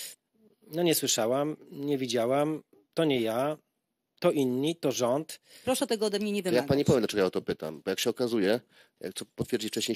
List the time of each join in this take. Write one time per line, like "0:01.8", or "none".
0:05.4